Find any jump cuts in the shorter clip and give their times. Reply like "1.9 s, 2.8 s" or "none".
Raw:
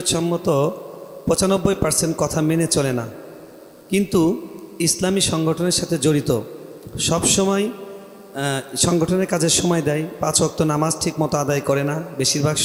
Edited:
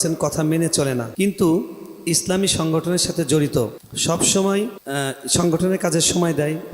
1.1 s, 3.9 s, 4.8 s